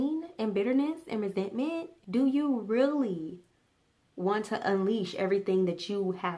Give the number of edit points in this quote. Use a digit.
1